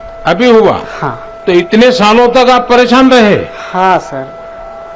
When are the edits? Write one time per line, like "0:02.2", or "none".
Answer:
none